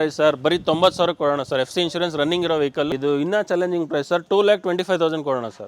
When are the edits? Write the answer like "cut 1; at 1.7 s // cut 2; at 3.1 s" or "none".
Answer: cut 1; at 2.9 s